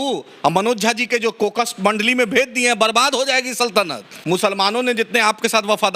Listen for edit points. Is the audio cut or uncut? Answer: cut